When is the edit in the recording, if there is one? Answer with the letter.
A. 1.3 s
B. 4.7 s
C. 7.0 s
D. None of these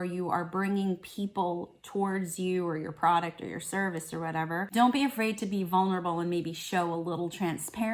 B